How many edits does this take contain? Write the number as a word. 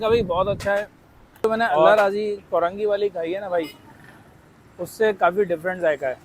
one